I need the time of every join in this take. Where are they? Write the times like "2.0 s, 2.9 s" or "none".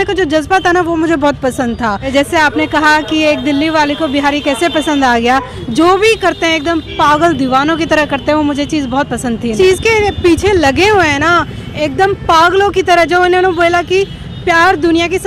2.1 s, 5.6 s, 9.5 s

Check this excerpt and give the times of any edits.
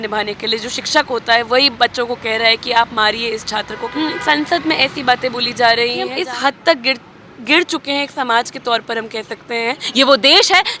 3.9 s, 6.1 s, 9.8 s

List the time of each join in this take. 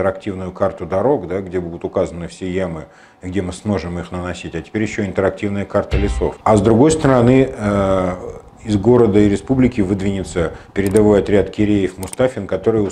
6.4 s

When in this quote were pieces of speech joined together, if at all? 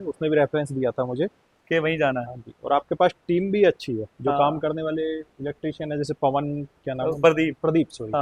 none

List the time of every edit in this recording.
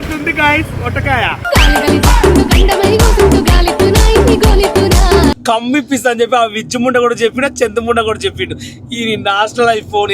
5.4 s

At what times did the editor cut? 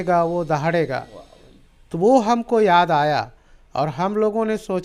none

